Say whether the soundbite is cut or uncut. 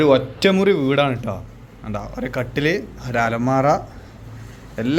uncut